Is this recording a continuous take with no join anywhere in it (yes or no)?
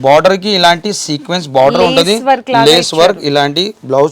yes